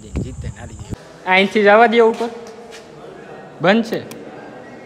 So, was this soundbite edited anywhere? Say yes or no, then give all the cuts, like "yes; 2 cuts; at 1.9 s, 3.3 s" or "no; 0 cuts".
yes; 1 cut; at 0.9 s